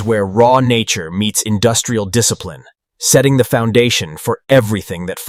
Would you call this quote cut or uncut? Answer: uncut